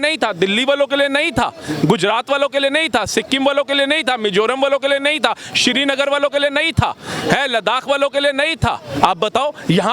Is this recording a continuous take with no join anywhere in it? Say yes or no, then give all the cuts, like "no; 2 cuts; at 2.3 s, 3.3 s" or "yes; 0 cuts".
yes; 0 cuts